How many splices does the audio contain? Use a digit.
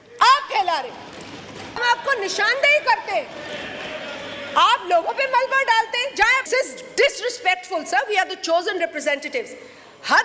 2